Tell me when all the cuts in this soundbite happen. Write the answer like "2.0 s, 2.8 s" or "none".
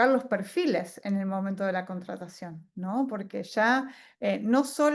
none

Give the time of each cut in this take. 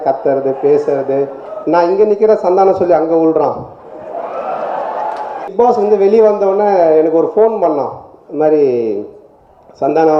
5.5 s

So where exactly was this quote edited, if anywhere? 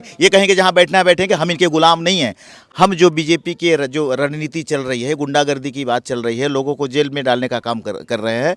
2.6 s

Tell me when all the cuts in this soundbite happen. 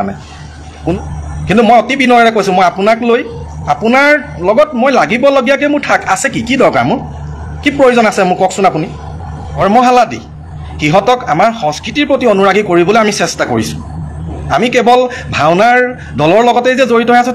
0.9 s, 9.5 s

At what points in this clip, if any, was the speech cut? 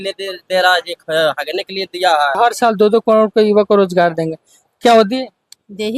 2.4 s

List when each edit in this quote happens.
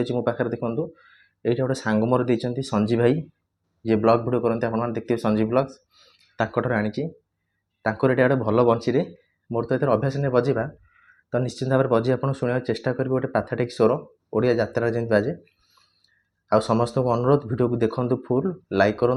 none

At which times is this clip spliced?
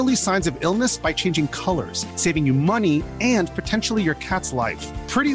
none

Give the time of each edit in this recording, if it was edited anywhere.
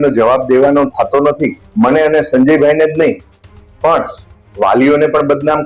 1.6 s

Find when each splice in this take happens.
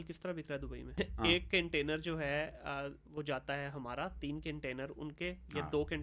0.9 s

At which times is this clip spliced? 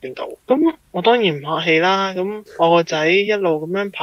2.4 s

